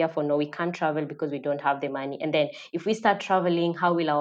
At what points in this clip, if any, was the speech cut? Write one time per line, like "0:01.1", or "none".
none